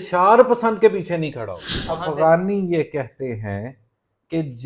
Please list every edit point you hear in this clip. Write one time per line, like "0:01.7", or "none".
0:02.0

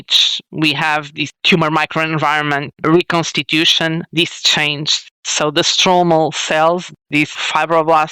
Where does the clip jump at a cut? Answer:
none

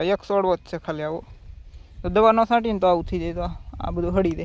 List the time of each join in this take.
none

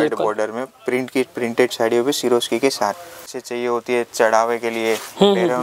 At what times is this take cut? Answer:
0:03.2

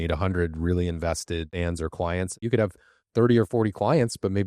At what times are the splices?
0:01.5
0:02.4

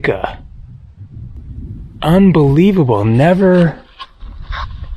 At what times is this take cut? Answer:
0:01.4

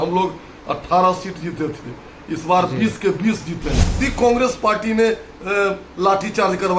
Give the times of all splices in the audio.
0:03.9

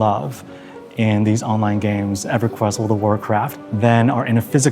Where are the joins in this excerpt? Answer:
0:03.6

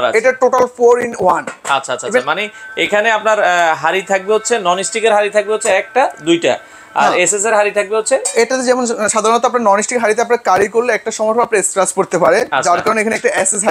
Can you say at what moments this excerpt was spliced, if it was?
none

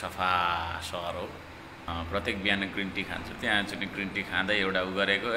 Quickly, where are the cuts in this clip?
0:01.8

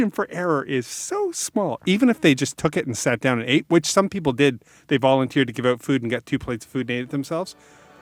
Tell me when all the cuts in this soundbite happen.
none

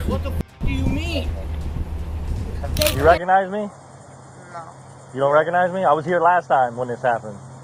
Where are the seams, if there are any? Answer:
0:02.9

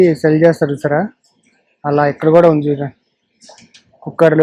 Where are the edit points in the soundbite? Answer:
none

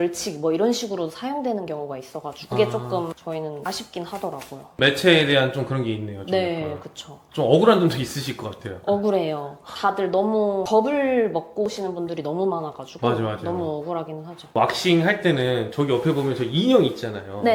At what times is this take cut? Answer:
none

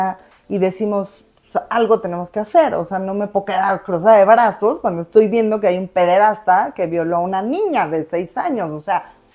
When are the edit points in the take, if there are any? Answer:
none

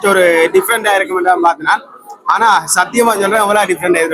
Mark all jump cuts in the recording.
none

